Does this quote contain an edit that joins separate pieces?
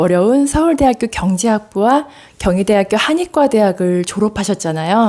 no; 0 cuts

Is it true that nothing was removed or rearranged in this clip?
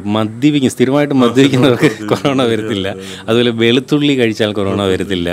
yes; 0 cuts

